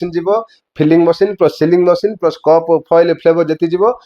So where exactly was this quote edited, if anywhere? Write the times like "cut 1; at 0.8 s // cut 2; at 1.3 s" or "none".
none